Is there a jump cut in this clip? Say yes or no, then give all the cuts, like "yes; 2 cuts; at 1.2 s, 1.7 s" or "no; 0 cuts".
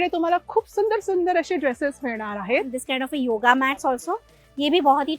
yes; 1 cut; at 2.8 s